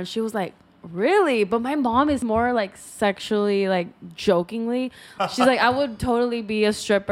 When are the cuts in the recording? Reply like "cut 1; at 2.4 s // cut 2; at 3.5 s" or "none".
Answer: cut 1; at 2.2 s // cut 2; at 5.0 s